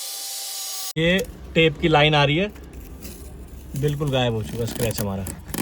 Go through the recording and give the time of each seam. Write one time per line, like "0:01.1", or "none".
0:01.0